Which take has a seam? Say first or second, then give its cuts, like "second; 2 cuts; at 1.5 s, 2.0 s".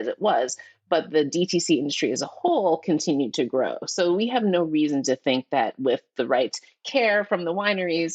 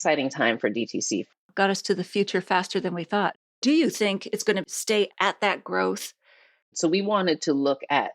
second; 4 cuts; at 1.4 s, 3.4 s, 5.1 s, 6.7 s